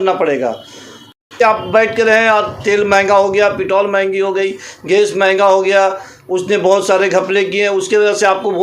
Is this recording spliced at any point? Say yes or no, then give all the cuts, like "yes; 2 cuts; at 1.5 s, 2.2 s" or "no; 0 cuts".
yes; 1 cut; at 1.3 s